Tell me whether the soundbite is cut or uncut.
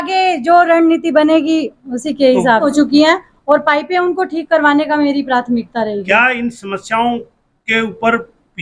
cut